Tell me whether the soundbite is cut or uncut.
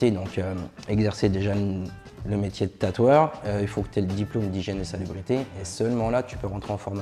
uncut